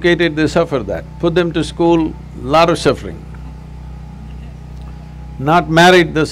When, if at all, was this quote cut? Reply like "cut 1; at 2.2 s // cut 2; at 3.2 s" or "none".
none